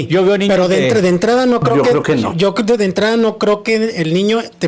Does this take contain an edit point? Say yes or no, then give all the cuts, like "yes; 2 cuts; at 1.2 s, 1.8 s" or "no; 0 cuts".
no; 0 cuts